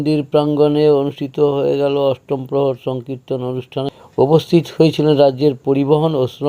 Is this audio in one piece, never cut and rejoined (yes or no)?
no